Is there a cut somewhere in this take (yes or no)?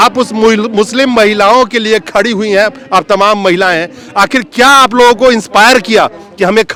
no